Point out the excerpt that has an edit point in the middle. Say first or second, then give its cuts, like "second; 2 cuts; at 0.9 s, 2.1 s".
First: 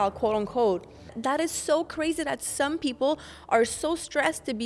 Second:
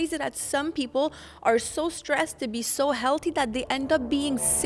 first; 1 cut; at 1.2 s